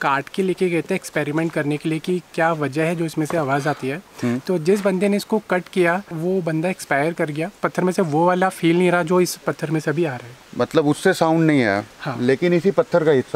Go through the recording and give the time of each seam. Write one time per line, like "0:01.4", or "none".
0:06.1
0:07.6